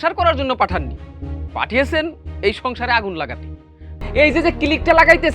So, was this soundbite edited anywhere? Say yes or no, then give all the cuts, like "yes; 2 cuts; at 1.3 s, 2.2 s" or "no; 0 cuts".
yes; 1 cut; at 4.0 s